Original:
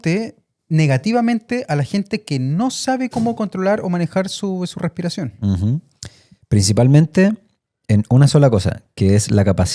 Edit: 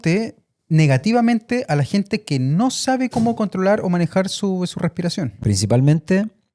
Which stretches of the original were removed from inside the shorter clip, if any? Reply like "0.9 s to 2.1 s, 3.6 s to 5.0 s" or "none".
5.3 s to 6.4 s